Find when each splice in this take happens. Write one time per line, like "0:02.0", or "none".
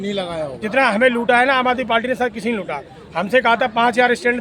none